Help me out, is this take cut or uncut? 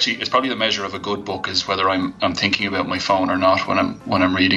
uncut